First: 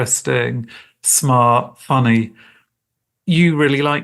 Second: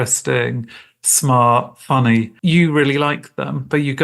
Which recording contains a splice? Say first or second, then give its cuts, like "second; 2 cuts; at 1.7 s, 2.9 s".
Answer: second; 1 cut; at 2.3 s